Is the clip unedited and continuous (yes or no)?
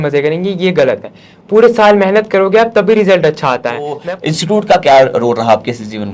no